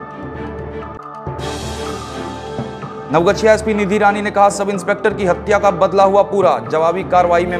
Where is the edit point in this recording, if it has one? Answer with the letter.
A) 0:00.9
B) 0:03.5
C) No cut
A